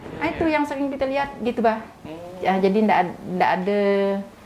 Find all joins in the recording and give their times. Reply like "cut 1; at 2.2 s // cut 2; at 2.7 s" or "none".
none

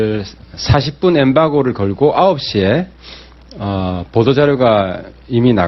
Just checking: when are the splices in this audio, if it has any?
cut 1; at 2.1 s

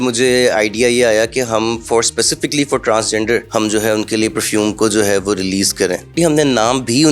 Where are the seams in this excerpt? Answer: cut 1; at 3.5 s // cut 2; at 6.1 s

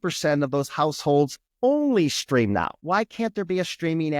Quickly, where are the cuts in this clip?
cut 1; at 1.4 s // cut 2; at 2.8 s

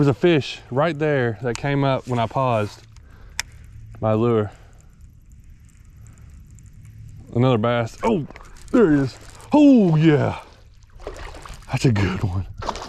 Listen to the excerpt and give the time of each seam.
none

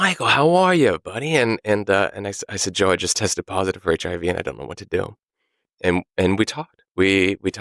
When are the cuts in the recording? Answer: cut 1; at 5.7 s

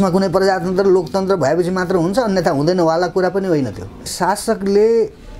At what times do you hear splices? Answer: cut 1; at 4.1 s

